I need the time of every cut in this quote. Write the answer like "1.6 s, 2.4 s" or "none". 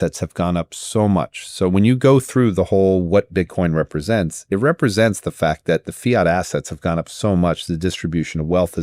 none

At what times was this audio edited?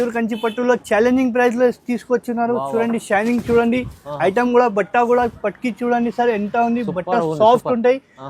none

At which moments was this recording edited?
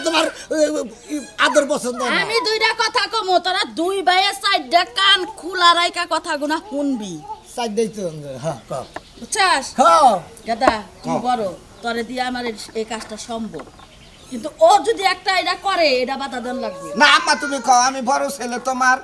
none

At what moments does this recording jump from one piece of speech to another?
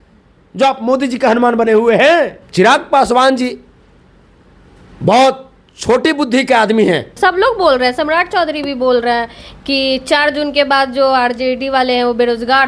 2.4 s, 7.1 s

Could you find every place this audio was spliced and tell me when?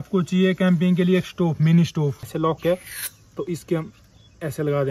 2.3 s

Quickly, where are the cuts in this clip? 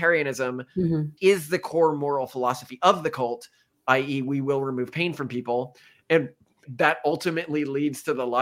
1.1 s, 6.6 s

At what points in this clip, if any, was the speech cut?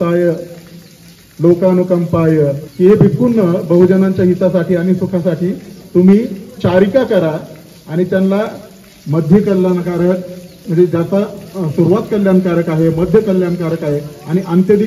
2.6 s

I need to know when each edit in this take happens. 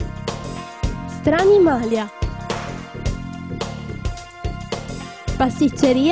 1.0 s

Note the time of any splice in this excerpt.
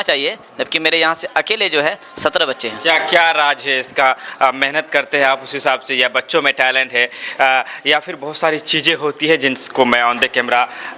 none

